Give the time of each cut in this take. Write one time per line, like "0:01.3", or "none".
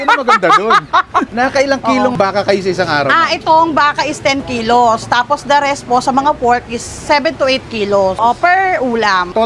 0:08.2